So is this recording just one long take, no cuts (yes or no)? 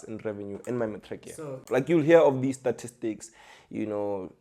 no